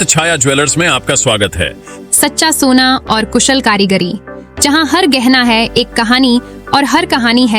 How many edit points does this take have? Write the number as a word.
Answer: zero